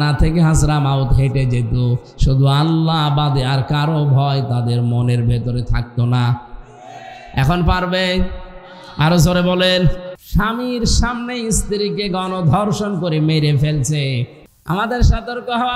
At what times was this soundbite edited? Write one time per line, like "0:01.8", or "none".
0:10.1
0:14.3